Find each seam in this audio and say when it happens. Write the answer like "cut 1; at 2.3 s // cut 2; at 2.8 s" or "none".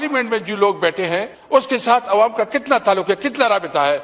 cut 1; at 1.3 s